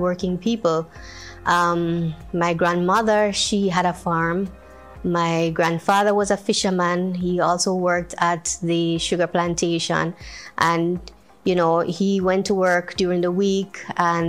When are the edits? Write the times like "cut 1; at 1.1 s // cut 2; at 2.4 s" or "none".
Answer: none